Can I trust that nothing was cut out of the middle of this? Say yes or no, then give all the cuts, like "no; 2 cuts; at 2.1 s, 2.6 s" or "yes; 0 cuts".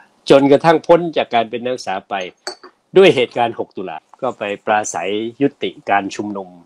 no; 1 cut; at 4.0 s